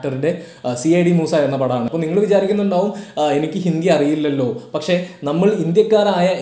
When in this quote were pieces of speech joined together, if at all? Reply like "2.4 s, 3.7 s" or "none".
1.9 s